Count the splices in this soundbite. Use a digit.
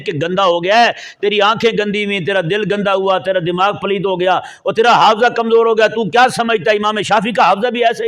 0